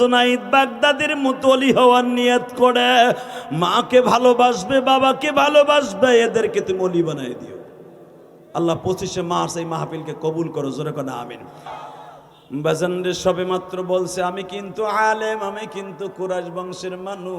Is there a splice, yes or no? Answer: yes